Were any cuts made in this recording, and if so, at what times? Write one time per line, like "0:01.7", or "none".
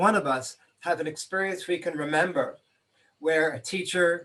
none